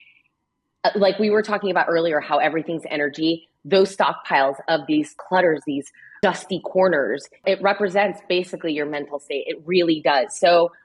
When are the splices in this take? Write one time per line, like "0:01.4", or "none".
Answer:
0:05.2
0:06.2
0:07.3